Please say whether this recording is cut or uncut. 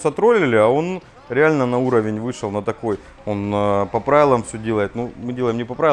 uncut